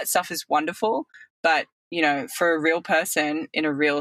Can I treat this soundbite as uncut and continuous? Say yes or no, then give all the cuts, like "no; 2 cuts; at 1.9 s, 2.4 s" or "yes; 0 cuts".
yes; 0 cuts